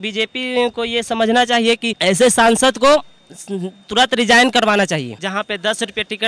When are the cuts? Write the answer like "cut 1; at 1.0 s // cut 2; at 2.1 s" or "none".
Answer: cut 1; at 1.9 s // cut 2; at 5.2 s